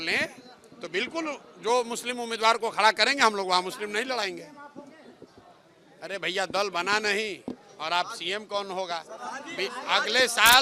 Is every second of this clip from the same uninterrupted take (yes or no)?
yes